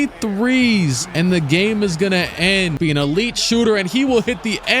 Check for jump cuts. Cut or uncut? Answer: cut